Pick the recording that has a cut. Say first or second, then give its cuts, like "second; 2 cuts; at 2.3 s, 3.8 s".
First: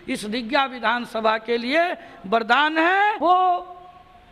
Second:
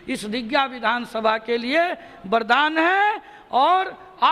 first; 1 cut; at 3.2 s